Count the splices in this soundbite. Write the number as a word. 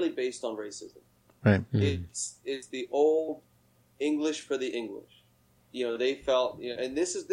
one